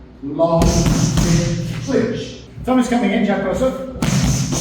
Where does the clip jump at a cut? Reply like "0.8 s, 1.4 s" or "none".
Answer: 2.4 s